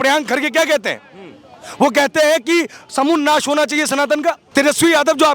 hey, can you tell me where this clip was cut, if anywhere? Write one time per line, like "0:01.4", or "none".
0:04.4